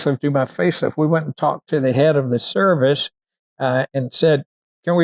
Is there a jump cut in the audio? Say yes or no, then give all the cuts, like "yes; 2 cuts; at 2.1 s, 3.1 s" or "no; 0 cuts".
no; 0 cuts